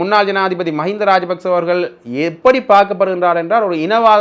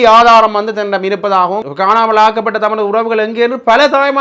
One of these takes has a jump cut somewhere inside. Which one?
second; 1 cut; at 1.6 s

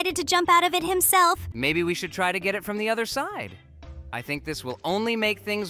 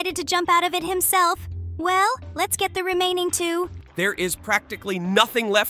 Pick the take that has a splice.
first; 1 cut; at 1.5 s

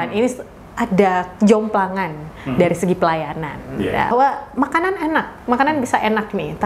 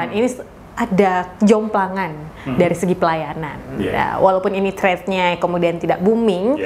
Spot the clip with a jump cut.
first; 1 cut; at 4.1 s

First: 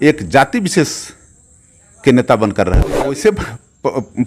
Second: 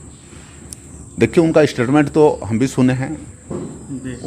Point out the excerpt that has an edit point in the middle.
first; 1 cut; at 3.2 s

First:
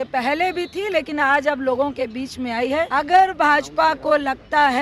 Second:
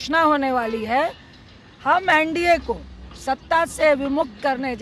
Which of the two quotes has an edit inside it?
first; 1 cut; at 2.9 s

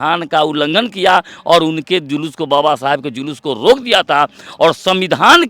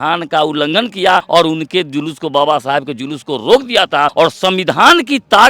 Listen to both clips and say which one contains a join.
second; 2 cuts; at 1.3 s, 4.1 s

